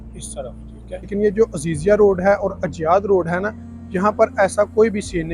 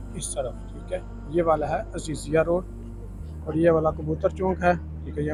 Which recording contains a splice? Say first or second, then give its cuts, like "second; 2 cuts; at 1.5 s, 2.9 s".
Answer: first; 1 cut; at 1.1 s